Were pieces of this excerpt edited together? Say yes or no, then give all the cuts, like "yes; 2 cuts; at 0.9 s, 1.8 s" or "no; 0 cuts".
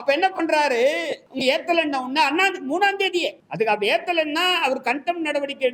yes; 2 cuts; at 1.2 s, 3.4 s